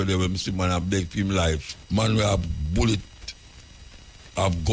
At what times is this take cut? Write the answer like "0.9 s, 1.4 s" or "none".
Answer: 1.7 s